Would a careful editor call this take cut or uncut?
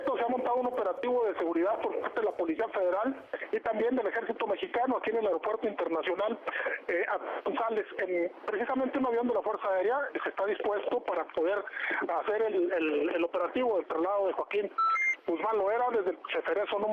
cut